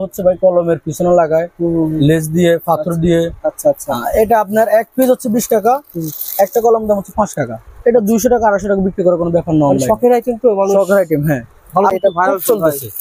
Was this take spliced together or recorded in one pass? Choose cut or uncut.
cut